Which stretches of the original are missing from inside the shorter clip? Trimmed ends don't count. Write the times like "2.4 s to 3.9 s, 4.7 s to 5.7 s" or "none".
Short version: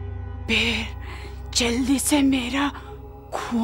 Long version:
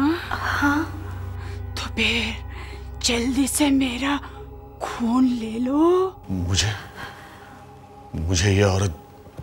none